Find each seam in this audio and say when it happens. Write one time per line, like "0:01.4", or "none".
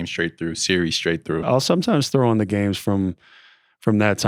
0:01.5